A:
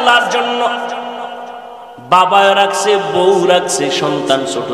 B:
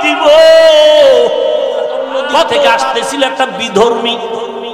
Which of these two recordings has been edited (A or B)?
B